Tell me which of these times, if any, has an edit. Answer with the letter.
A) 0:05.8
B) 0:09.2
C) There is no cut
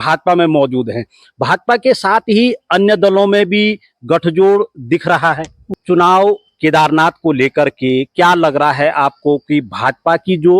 A